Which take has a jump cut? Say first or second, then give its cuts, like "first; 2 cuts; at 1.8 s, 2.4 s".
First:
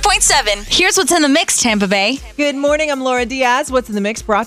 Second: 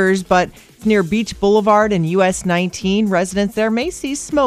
first; 1 cut; at 2.3 s